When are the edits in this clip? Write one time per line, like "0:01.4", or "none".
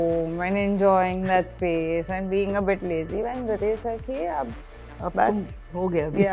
none